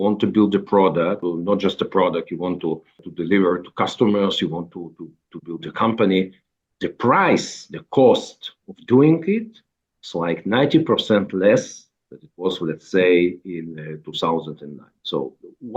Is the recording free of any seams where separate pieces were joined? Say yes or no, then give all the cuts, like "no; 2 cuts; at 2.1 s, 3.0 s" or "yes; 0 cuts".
no; 2 cuts; at 1.2 s, 3.0 s